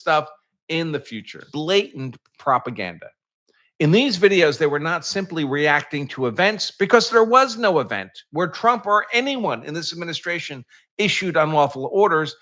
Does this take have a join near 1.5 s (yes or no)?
yes